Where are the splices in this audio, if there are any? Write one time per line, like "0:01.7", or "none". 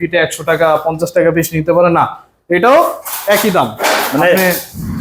none